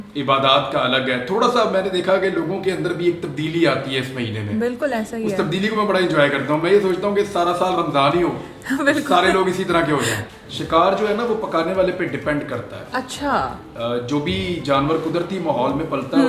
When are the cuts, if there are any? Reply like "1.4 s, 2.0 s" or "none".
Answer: 10.2 s